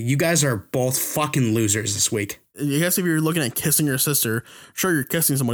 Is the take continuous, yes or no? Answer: no